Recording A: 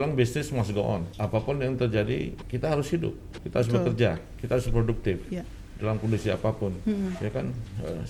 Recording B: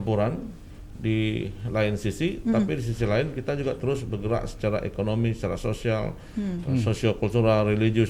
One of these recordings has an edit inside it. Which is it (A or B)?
A